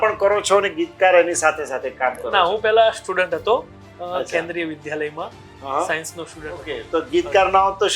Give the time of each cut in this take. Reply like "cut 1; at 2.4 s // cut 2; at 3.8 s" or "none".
cut 1; at 6.8 s